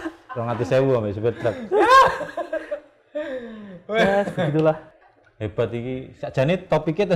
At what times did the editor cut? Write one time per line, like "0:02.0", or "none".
0:04.9